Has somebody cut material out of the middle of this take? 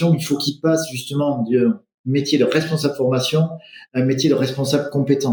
no; 0 cuts

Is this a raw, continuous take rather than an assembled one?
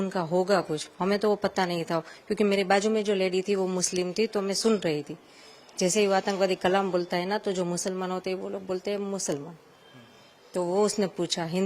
yes; 0 cuts

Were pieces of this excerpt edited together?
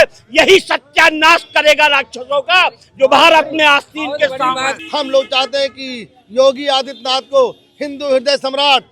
yes; 1 cut; at 4.8 s

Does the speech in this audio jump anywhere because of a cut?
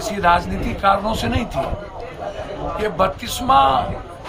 no; 0 cuts

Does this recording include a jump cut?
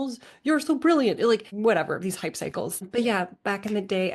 yes; 2 cuts; at 1.5 s, 2.9 s

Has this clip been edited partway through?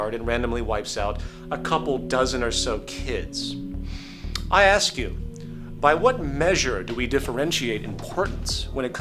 yes; 1 cut; at 2.4 s

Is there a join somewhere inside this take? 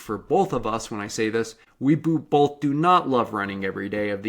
yes; 1 cut; at 1.6 s

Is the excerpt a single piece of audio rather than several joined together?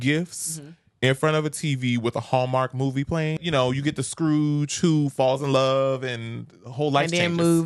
no; 1 cut; at 3.4 s

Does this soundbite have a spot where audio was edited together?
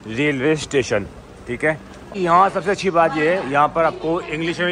yes; 1 cut; at 2.1 s

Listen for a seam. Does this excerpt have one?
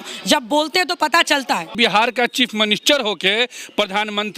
yes; 1 cut; at 1.7 s

